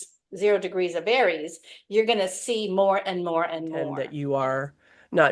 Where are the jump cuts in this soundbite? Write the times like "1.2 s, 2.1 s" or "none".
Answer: 4.1 s